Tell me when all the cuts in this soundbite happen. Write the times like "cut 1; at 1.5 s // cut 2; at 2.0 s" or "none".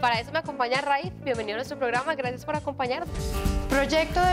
cut 1; at 3.2 s